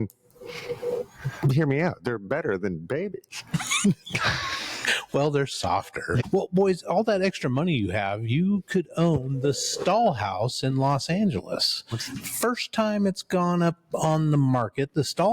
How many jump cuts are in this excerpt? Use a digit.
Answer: 1